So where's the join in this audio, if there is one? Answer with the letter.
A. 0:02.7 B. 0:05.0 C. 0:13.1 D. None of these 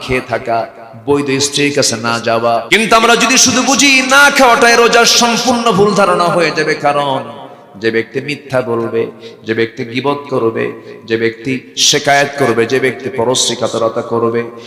A